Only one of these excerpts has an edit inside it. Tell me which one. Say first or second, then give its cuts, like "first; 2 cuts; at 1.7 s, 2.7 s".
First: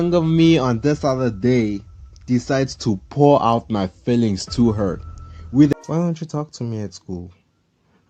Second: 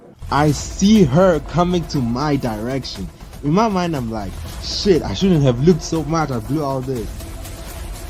first; 1 cut; at 5.7 s